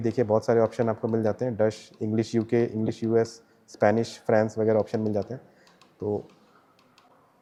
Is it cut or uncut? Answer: uncut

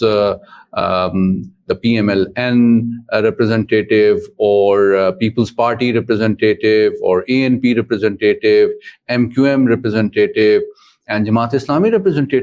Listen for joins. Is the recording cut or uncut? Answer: uncut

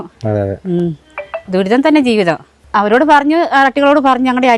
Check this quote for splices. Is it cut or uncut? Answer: cut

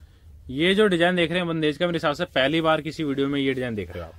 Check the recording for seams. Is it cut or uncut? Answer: uncut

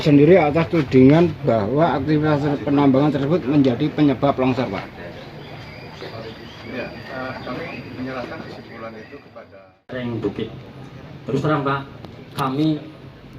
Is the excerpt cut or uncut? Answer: cut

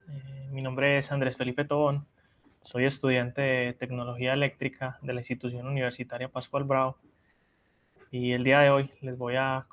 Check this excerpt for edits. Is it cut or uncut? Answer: uncut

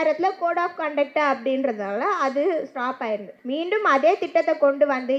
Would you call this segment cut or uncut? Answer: cut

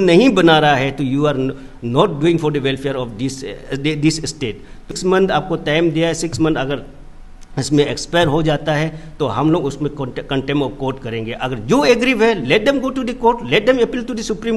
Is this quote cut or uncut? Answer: cut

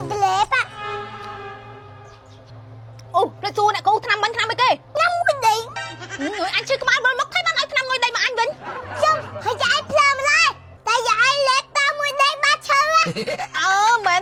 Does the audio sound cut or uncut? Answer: uncut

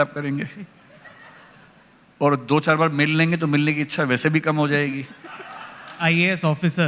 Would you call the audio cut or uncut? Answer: cut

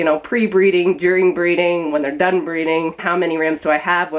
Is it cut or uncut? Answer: cut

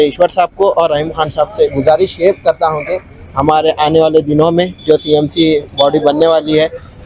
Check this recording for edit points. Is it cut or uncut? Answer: uncut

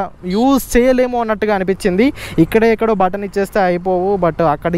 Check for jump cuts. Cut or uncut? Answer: uncut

